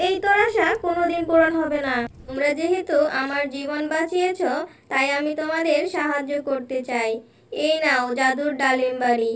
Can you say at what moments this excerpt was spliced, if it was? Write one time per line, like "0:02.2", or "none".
0:02.2